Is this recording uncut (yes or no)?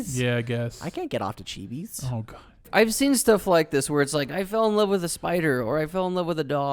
no